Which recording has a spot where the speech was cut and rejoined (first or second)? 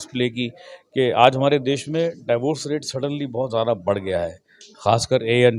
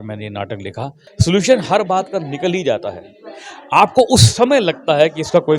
second